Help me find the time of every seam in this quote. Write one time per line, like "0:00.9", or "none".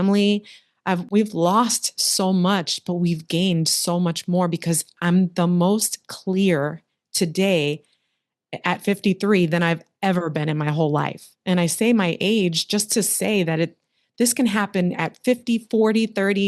none